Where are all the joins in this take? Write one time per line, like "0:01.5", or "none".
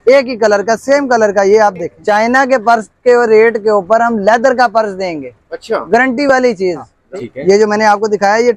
0:01.9
0:06.9